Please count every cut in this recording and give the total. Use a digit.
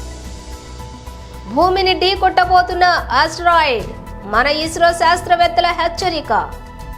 1